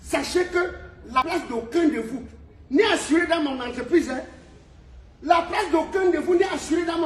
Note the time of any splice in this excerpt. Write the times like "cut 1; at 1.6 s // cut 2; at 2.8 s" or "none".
cut 1; at 1.2 s